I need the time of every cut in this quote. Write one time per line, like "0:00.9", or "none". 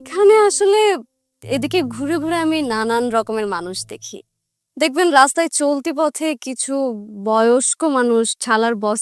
none